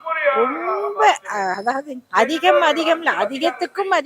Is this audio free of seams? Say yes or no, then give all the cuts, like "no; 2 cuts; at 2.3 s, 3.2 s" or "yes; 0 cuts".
no; 1 cut; at 1.9 s